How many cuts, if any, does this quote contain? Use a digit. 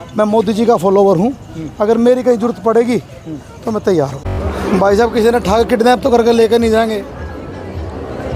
1